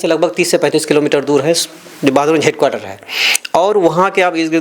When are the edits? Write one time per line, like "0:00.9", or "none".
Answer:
none